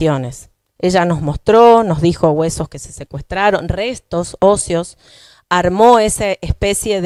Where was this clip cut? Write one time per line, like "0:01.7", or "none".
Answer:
none